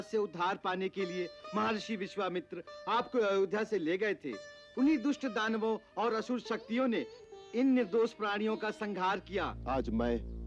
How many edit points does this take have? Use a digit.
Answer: 1